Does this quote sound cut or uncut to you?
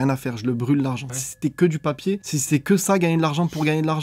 cut